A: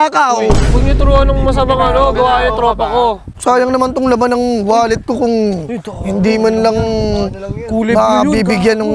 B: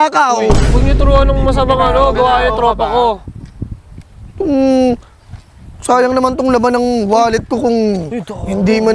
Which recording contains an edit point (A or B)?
A